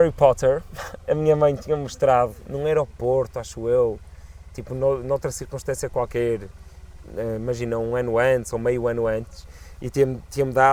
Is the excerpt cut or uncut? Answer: uncut